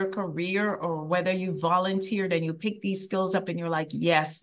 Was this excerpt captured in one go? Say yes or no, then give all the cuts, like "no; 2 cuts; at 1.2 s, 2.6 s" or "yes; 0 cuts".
yes; 0 cuts